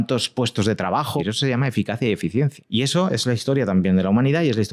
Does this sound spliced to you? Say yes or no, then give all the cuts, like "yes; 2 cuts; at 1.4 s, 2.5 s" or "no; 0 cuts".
yes; 2 cuts; at 1.2 s, 2.6 s